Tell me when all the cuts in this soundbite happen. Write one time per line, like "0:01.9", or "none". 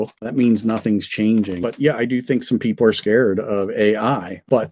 0:01.6

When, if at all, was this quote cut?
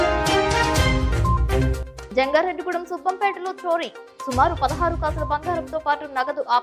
none

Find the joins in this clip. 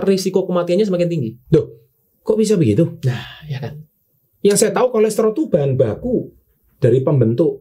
none

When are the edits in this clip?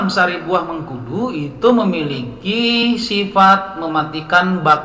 none

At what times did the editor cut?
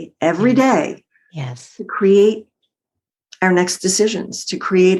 none

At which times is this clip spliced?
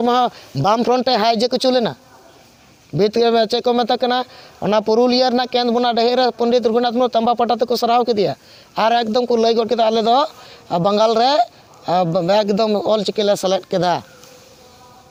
none

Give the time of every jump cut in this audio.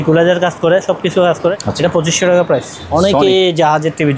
0:01.6
0:02.8

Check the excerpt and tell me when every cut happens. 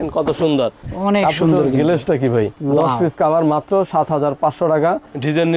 none

